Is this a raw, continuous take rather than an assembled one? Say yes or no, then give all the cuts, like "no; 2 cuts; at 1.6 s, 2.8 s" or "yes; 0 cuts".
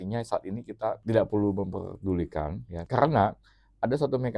no; 2 cuts; at 1.0 s, 2.8 s